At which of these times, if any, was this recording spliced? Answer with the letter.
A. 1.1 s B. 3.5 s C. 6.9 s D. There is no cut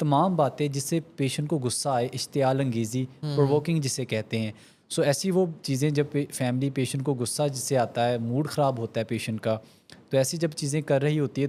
D